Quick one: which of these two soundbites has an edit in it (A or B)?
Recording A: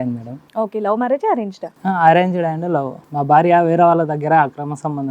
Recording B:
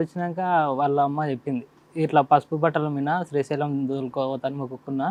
A